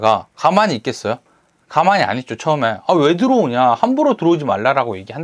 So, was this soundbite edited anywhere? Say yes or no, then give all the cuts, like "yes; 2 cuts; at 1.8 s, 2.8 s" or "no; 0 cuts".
no; 0 cuts